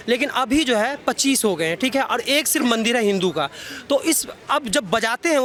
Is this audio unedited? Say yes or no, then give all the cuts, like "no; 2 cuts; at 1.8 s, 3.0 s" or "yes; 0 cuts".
yes; 0 cuts